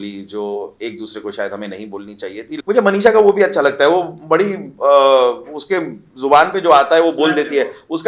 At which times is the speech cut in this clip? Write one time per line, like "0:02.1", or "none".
0:02.5